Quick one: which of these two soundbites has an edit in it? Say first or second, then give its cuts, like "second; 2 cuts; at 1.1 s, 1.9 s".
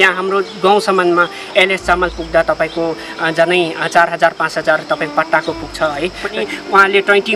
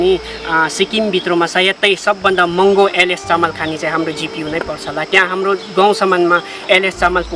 first; 1 cut; at 6.3 s